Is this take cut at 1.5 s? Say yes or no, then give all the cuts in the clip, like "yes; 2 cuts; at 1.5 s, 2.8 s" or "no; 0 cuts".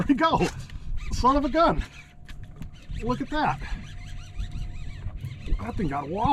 no; 0 cuts